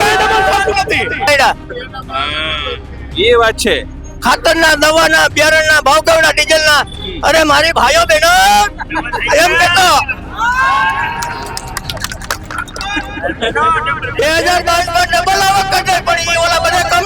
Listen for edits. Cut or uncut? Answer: cut